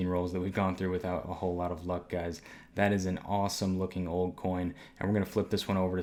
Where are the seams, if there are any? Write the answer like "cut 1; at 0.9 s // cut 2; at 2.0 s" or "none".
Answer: none